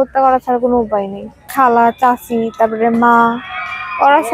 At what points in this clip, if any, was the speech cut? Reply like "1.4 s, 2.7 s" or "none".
1.5 s